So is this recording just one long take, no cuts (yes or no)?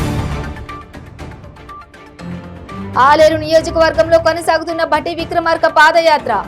no